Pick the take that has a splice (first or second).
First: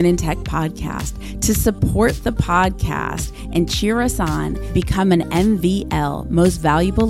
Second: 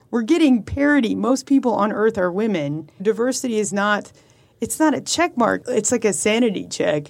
second